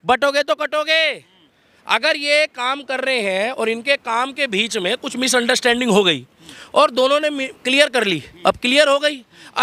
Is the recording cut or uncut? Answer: uncut